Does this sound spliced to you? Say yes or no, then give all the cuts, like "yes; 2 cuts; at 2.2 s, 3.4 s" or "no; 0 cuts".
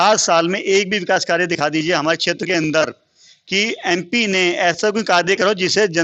no; 0 cuts